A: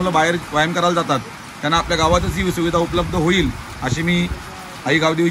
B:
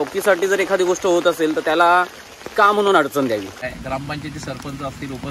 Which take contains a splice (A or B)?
B